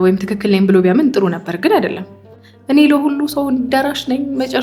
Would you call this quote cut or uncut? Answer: uncut